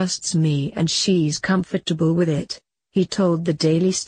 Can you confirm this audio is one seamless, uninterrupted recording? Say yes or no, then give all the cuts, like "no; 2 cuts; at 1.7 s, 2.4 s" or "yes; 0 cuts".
no; 1 cut; at 3.0 s